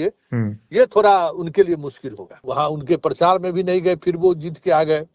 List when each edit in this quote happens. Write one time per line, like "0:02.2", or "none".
0:02.4